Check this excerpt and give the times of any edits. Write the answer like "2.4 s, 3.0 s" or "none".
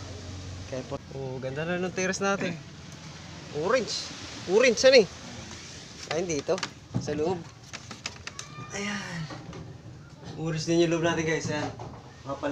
1.0 s